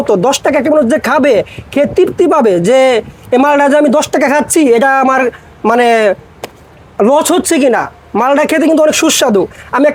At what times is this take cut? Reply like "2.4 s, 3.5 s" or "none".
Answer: none